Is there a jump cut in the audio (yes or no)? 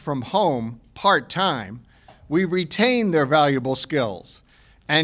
no